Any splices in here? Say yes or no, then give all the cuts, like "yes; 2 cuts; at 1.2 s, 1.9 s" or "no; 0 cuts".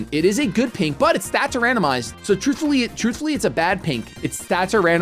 no; 0 cuts